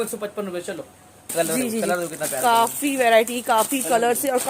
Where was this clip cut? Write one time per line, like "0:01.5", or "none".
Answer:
0:01.3